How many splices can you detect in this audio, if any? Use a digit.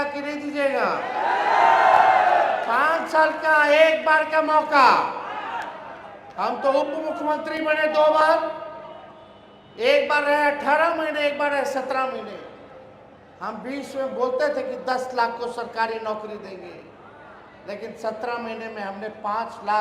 0